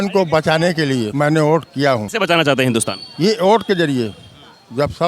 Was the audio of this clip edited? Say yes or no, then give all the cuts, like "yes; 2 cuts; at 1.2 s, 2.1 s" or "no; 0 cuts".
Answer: yes; 2 cuts; at 1.1 s, 2.1 s